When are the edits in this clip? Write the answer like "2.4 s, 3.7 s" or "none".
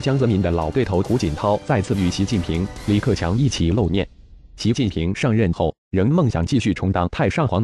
3.6 s